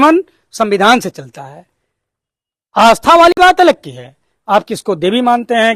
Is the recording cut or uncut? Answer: uncut